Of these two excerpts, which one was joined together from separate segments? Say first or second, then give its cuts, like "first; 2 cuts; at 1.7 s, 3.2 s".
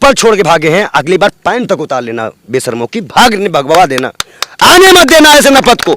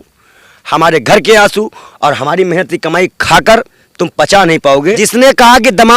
second; 1 cut; at 5.0 s